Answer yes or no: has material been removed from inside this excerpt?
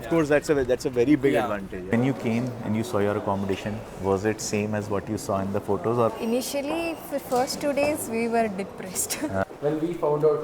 yes